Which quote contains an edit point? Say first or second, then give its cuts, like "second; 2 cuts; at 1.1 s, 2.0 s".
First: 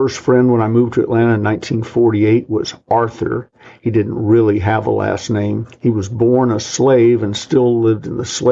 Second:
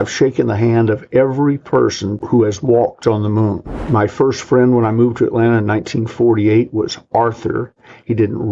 second; 1 cut; at 2.1 s